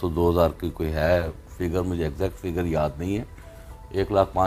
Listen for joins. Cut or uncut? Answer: uncut